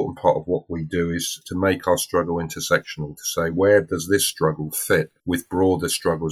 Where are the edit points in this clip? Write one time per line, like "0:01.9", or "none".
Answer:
0:01.4
0:05.2